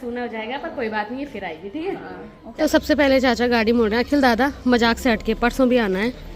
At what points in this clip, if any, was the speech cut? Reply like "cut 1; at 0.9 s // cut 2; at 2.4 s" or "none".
none